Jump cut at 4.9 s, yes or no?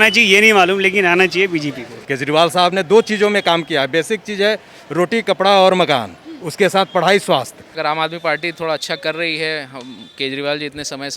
no